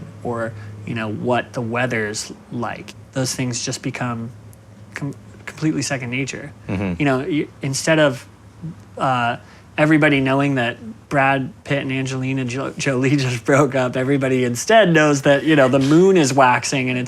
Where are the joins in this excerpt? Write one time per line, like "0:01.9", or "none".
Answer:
0:03.0
0:10.9
0:11.6